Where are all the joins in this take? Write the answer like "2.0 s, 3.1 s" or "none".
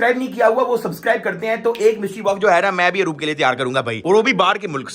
none

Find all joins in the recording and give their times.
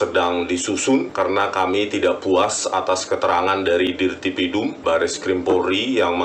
1.1 s, 4.8 s

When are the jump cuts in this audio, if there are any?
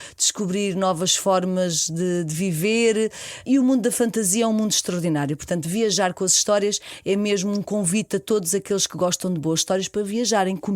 3.4 s

